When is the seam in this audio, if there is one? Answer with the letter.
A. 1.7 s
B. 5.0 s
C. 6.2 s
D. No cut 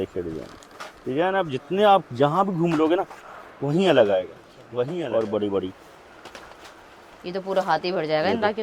B